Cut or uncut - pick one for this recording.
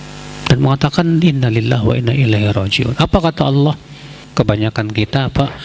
cut